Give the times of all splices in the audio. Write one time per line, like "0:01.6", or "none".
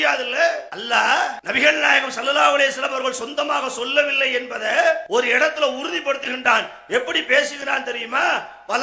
0:01.4
0:05.0